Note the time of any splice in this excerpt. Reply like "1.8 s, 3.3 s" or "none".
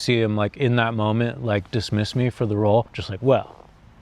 3.0 s